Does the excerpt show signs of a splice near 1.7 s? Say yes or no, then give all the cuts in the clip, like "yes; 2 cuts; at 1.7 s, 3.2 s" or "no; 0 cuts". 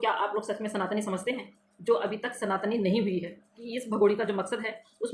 no; 1 cut; at 3.6 s